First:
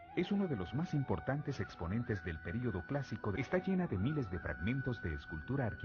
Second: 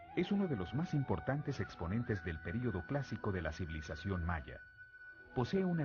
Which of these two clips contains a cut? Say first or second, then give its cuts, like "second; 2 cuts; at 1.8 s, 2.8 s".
second; 1 cut; at 3.3 s